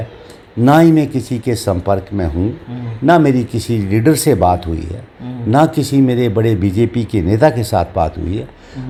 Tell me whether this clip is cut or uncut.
uncut